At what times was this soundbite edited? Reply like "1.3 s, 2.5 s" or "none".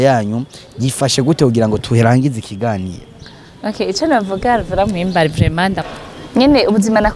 5.8 s